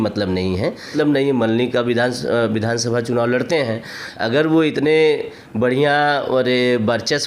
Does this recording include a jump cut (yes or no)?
yes